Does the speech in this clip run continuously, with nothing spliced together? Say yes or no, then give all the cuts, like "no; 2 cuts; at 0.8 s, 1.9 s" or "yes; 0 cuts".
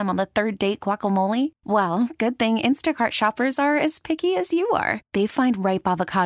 yes; 0 cuts